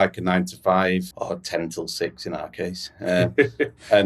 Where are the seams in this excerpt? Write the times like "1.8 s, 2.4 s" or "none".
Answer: 1.1 s